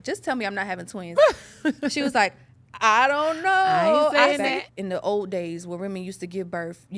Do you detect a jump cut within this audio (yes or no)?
yes